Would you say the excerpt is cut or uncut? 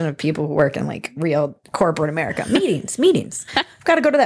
uncut